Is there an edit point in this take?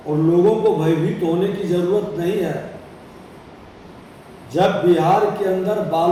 no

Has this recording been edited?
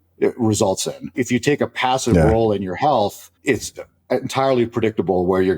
yes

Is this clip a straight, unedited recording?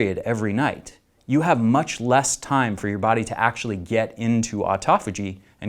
yes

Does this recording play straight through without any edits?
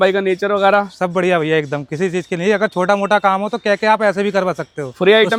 yes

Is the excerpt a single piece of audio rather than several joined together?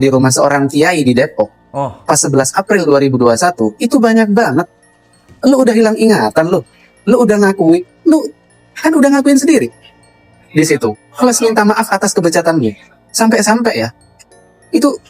yes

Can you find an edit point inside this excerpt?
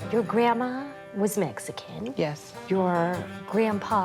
yes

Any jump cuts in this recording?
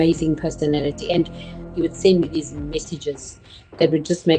no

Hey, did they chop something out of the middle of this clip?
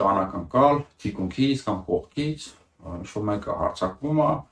no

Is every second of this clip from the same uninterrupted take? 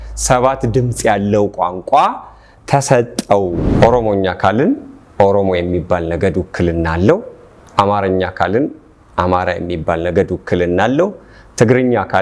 no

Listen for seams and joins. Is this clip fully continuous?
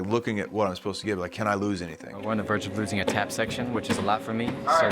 no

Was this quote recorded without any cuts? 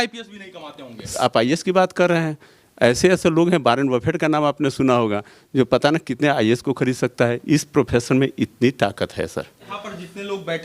no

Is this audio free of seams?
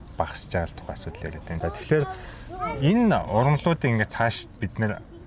no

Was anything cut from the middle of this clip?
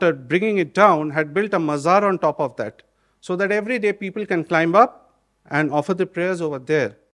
no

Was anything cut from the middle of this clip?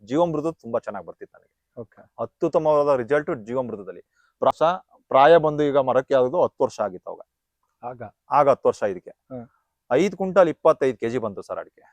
yes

